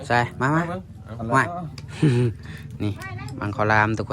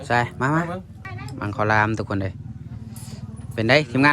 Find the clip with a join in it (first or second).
second